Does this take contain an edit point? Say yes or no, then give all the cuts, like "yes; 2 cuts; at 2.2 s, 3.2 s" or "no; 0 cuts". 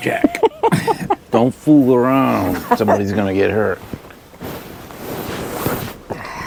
no; 0 cuts